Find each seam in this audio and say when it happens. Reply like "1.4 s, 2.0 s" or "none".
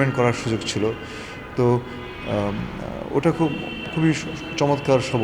none

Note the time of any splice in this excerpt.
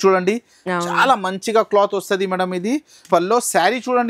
3.0 s

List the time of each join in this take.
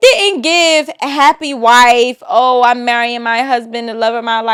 none

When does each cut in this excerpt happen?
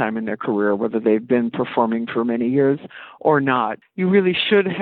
3.8 s

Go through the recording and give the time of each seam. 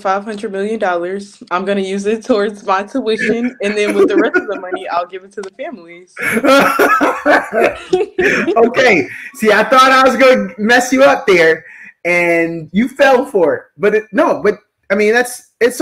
none

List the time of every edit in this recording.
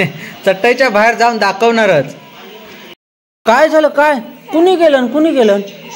2.9 s

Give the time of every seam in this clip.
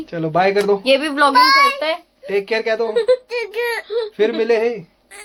none

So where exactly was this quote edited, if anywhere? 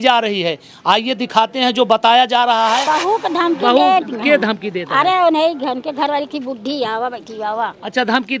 2.9 s

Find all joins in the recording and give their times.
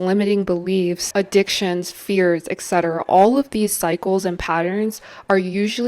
1.0 s

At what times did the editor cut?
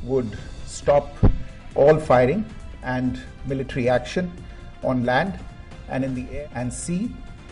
6.2 s

